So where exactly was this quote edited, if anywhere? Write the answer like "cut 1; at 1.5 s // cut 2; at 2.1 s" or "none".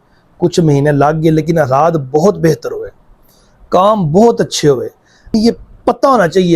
cut 1; at 5.3 s

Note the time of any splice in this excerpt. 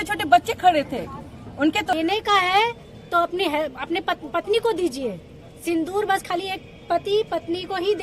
cut 1; at 1.9 s

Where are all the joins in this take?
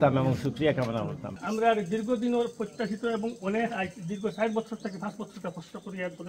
cut 1; at 1.4 s

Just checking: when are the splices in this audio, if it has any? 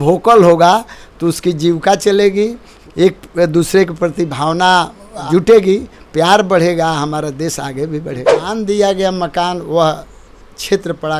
cut 1; at 2.8 s // cut 2; at 8.4 s

